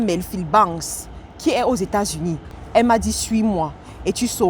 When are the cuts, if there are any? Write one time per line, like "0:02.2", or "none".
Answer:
0:02.5